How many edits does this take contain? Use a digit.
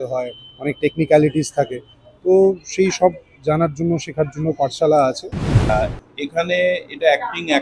1